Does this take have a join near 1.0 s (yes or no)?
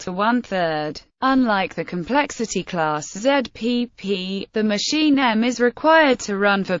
yes